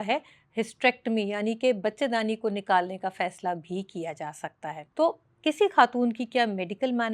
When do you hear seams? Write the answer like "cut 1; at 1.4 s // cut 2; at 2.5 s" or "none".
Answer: none

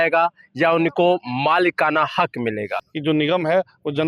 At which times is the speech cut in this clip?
cut 1; at 2.8 s

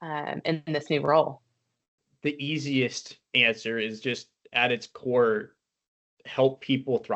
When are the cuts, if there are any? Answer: cut 1; at 2.0 s

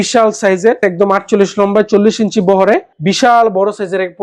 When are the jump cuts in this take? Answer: none

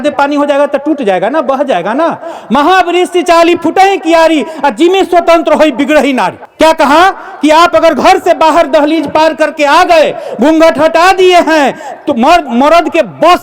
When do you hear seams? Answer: cut 1; at 6.4 s

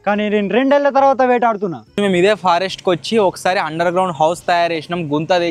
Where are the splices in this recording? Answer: cut 1; at 1.9 s

